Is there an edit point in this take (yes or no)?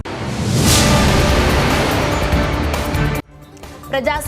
no